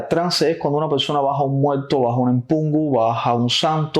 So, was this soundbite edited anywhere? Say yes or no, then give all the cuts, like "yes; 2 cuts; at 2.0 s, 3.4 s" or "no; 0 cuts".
no; 0 cuts